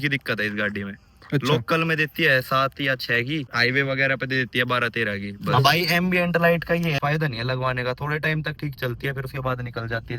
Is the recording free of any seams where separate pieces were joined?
no; 3 cuts; at 3.5 s, 5.3 s, 7.0 s

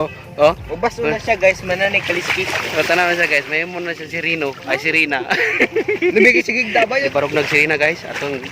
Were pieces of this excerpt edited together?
yes; 1 cut; at 7.1 s

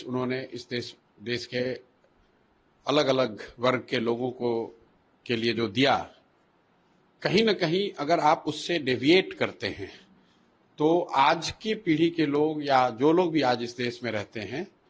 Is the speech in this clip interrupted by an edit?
no; 0 cuts

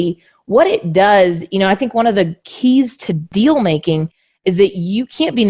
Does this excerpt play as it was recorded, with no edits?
no; 1 cut; at 3.2 s

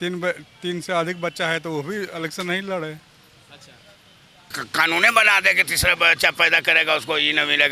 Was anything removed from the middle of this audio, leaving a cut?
yes; 1 cut; at 4.6 s

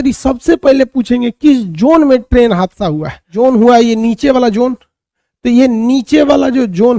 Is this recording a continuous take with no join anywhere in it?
no; 1 cut; at 3.3 s

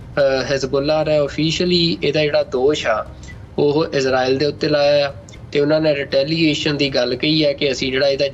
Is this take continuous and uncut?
yes; 0 cuts

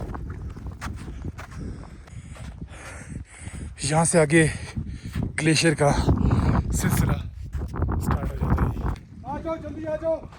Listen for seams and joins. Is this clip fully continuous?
no; 2 cuts; at 2.0 s, 9.1 s

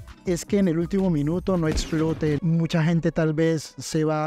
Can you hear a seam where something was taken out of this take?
yes; 1 cut; at 2.4 s

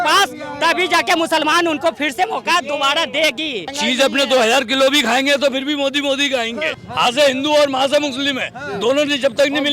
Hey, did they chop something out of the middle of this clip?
yes; 2 cuts; at 3.7 s, 6.8 s

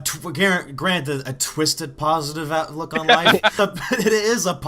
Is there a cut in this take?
yes; 1 cut; at 3.6 s

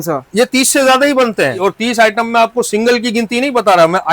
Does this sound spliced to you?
yes; 1 cut; at 1.6 s

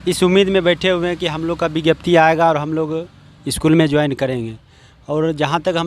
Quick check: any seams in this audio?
no; 0 cuts

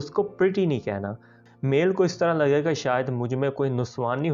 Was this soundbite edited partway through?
yes; 1 cut; at 1.4 s

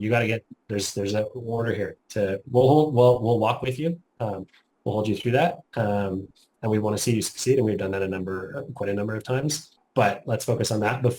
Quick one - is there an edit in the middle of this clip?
yes; 1 cut; at 9.7 s

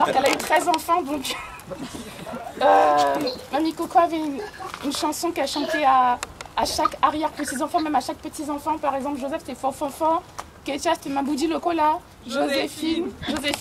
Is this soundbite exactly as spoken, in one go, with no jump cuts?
yes; 0 cuts

